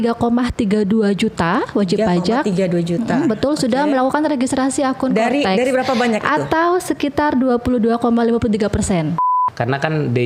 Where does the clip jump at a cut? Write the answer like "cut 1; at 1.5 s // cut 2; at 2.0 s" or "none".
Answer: cut 1; at 9.3 s